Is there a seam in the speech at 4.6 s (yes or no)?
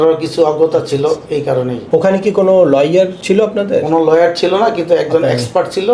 no